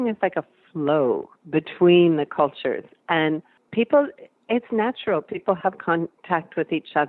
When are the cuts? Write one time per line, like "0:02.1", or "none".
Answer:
0:03.6
0:06.2